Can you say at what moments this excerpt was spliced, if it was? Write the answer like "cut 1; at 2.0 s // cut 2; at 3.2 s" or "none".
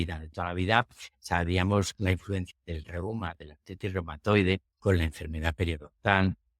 cut 1; at 2.5 s // cut 2; at 4.7 s